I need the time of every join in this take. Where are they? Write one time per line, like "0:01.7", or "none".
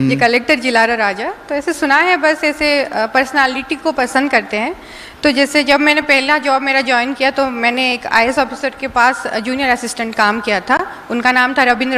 none